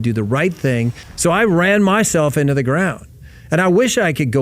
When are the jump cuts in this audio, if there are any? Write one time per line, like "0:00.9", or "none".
0:01.0